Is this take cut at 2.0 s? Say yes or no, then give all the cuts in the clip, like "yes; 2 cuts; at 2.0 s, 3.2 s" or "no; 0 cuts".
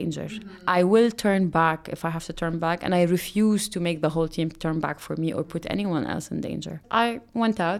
no; 1 cut; at 6.8 s